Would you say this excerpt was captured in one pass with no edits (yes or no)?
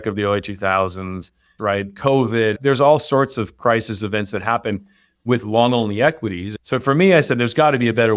no